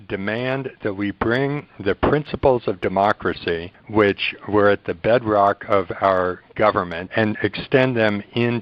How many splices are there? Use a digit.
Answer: 2